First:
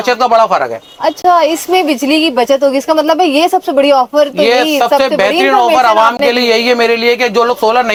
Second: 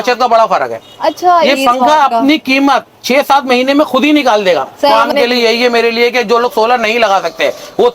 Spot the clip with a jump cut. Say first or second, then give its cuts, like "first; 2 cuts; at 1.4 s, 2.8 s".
second; 2 cuts; at 1.5 s, 4.9 s